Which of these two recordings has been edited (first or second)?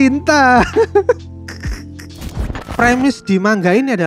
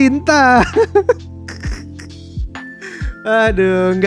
first